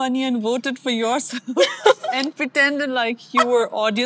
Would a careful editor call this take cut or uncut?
uncut